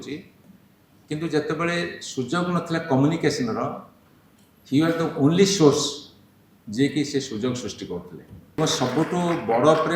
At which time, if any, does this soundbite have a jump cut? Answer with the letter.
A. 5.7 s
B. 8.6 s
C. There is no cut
B